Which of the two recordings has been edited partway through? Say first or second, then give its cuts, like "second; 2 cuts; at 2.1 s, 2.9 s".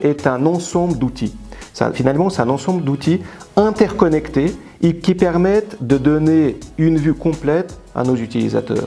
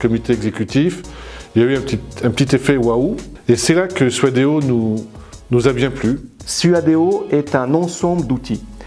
second; 2 cuts; at 3.3 s, 6.3 s